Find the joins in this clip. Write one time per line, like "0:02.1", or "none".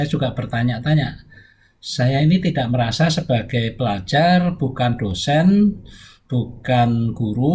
none